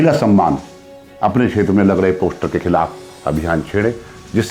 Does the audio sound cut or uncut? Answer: cut